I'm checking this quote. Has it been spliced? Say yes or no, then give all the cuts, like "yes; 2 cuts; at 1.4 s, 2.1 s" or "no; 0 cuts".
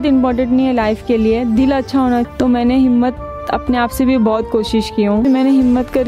yes; 2 cuts; at 2.3 s, 5.3 s